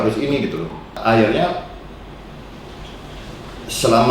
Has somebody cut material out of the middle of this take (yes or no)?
yes